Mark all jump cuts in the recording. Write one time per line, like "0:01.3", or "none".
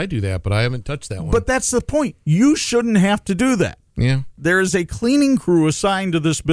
0:04.3